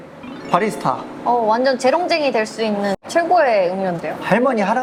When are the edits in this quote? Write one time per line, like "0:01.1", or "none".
none